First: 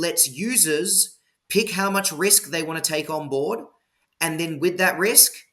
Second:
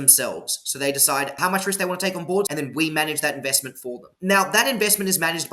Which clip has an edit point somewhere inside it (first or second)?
second